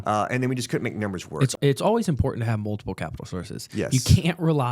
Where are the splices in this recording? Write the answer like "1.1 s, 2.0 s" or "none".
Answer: 1.5 s